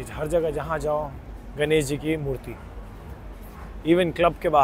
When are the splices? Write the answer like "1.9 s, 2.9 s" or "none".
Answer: none